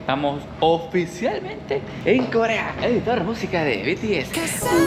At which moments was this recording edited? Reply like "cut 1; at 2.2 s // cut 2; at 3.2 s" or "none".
none